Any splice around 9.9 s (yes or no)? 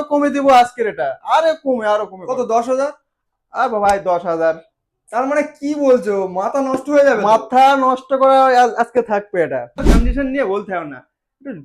yes